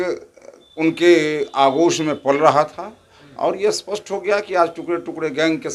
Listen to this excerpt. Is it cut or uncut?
uncut